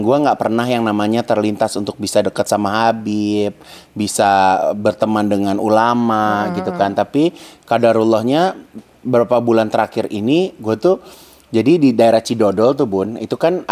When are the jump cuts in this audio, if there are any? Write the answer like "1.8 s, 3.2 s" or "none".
none

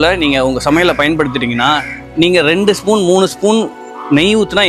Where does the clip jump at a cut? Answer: none

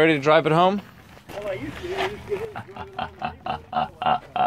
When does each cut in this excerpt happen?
1.2 s

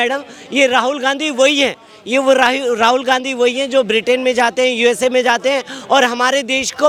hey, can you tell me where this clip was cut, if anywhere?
none

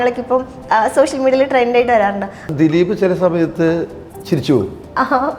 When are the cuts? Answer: 2.3 s

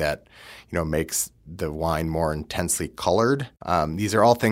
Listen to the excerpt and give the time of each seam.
3.5 s

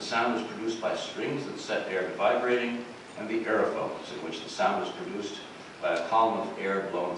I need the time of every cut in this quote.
2.3 s

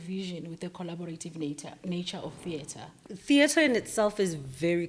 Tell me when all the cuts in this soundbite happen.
2.9 s

